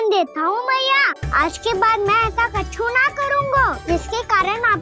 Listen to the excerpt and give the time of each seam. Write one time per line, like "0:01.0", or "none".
0:01.2
0:03.8

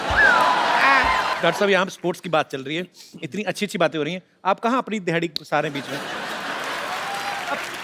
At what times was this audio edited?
0:01.3

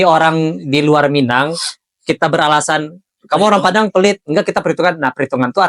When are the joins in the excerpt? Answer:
none

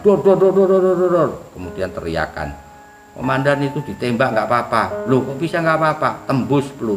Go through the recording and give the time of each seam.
none

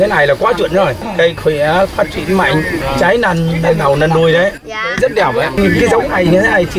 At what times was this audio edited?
0:01.0
0:02.8
0:05.6

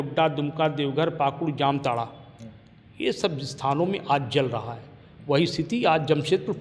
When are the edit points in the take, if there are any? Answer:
none

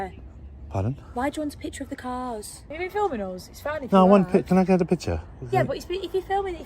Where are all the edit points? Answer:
0:02.6

